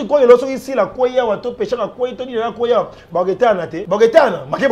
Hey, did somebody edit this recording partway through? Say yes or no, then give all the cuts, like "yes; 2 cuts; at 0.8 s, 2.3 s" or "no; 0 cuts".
yes; 1 cut; at 3.8 s